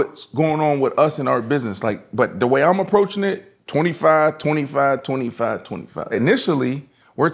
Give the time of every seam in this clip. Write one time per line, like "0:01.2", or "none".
0:06.1